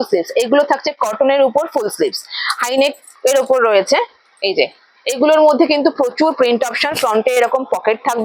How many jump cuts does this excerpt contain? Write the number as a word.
zero